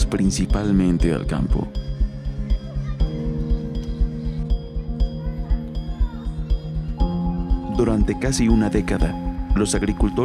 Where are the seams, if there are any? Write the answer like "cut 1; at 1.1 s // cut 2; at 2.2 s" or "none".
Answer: cut 1; at 8.4 s